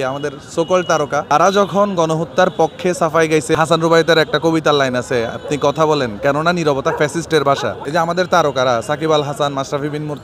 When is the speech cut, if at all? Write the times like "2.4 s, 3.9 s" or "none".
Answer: 1.3 s, 3.5 s, 7.8 s